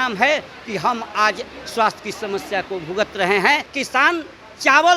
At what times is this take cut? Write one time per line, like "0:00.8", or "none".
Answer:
0:03.7